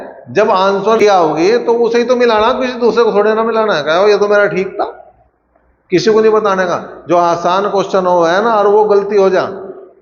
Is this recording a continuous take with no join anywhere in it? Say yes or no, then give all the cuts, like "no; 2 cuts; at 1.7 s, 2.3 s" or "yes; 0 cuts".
no; 1 cut; at 1.0 s